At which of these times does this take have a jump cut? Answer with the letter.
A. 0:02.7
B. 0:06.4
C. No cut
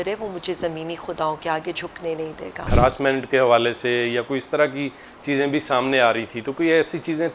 A